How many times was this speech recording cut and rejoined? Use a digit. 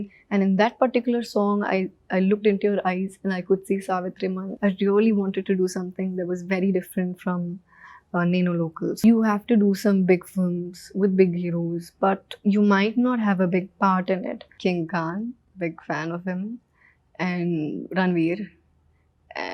3